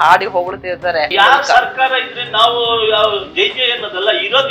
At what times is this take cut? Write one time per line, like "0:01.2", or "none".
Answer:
0:01.1